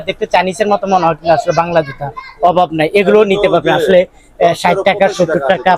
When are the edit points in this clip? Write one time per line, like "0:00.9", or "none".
none